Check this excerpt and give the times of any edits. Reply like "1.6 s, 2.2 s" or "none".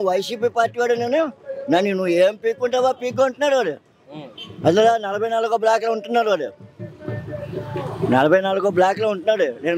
none